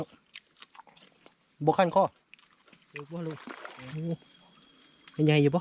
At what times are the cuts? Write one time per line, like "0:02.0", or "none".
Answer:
0:01.2
0:03.1